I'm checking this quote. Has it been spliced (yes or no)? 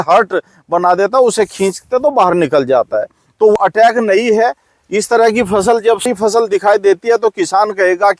yes